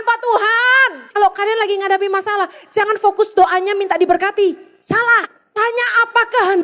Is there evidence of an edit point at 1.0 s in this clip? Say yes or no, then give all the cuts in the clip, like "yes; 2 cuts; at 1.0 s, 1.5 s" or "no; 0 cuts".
yes; 2 cuts; at 1.0 s, 5.4 s